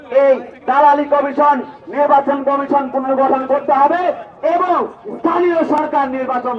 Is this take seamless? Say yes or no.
yes